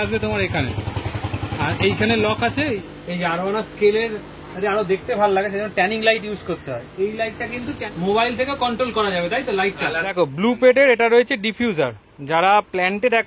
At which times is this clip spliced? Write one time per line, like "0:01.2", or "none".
0:02.8
0:07.8
0:10.0